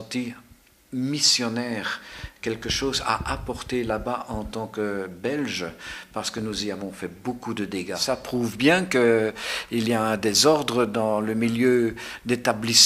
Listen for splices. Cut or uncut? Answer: cut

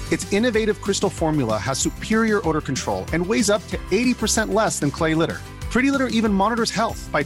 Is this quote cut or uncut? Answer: uncut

